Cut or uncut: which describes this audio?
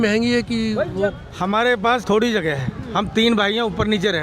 cut